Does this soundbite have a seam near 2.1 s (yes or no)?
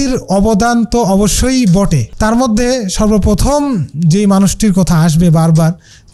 yes